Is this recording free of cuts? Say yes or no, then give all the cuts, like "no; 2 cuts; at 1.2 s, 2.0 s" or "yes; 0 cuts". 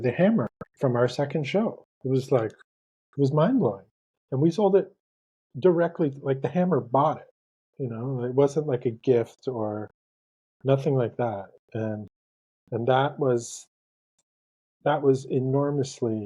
no; 1 cut; at 4.1 s